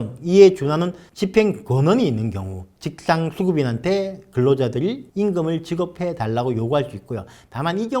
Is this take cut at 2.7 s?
yes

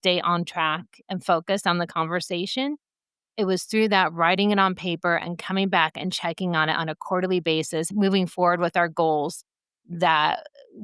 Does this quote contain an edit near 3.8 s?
no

